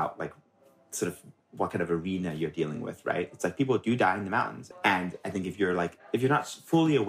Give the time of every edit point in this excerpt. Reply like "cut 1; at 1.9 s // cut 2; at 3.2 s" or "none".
cut 1; at 4.6 s